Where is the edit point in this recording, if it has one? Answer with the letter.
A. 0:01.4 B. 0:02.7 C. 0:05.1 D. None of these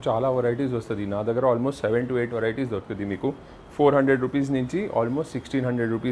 D